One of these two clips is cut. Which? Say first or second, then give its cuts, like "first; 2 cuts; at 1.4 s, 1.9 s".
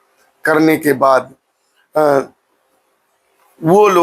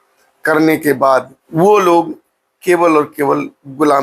second; 1 cut; at 1.4 s